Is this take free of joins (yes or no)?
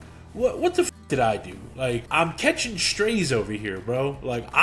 no